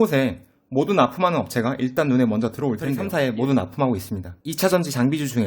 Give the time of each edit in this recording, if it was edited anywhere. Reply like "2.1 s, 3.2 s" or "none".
3.0 s